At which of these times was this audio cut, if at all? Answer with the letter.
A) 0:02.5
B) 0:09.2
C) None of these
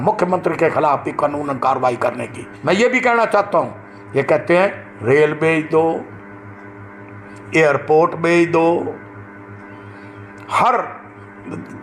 A